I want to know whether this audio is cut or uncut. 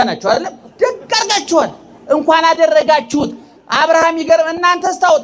uncut